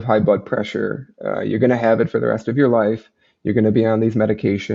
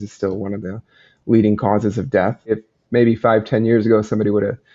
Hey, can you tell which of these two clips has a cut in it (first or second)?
second